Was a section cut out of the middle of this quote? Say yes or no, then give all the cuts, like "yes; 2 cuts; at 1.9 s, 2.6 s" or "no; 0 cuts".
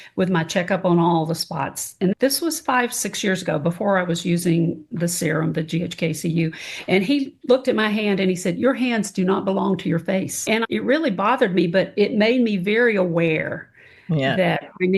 yes; 1 cut; at 2.1 s